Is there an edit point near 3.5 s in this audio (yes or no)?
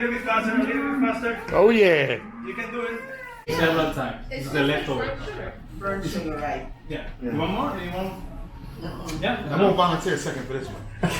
yes